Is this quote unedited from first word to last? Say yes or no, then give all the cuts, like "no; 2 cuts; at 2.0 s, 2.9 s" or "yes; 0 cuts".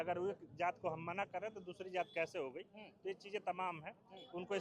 yes; 0 cuts